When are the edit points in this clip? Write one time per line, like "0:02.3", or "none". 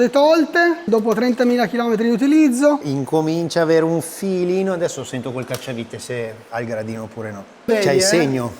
0:02.8
0:07.7